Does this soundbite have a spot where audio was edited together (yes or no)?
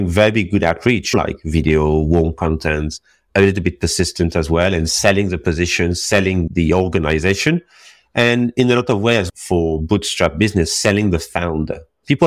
yes